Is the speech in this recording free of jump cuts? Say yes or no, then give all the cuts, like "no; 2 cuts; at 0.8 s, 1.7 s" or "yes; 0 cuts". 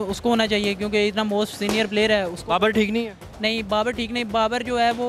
yes; 0 cuts